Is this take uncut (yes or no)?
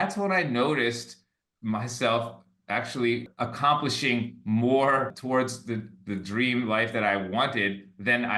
no